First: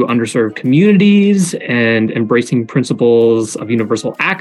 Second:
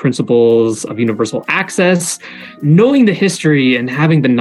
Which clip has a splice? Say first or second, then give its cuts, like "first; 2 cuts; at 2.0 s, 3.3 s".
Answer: second; 1 cut; at 2.6 s